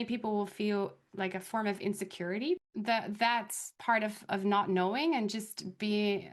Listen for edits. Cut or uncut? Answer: cut